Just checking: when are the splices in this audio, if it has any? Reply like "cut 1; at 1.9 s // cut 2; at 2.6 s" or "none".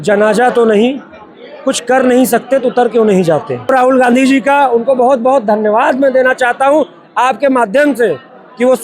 cut 1; at 3.7 s